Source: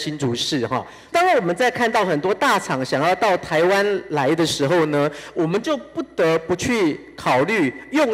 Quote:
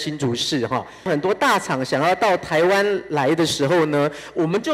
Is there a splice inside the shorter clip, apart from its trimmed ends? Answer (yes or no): yes